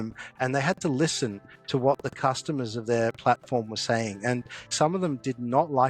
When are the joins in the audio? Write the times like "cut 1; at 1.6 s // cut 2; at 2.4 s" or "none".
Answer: cut 1; at 4.7 s